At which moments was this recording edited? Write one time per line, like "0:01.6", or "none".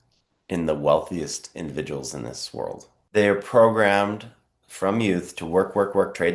0:03.0

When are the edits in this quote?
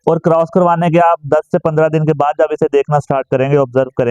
none

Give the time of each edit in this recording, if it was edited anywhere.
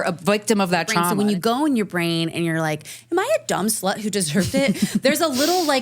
0:01.1

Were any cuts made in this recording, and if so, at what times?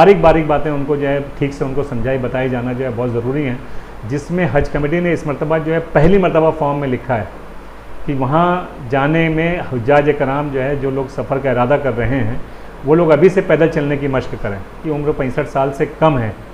0:14.8

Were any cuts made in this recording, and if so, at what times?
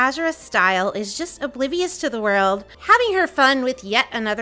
0:02.7

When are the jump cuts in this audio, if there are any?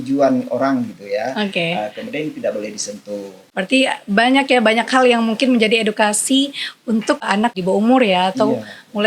0:03.4
0:07.5

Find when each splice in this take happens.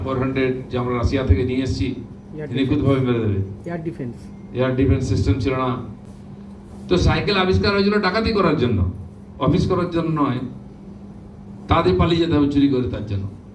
0:06.0

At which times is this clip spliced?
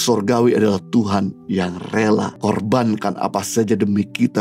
0:02.3

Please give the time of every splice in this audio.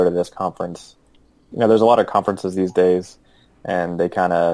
0:01.4

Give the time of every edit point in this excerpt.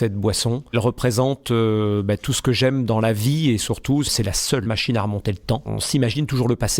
0:00.7
0:04.2
0:05.8

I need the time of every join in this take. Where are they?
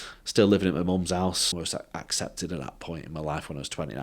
0:01.6

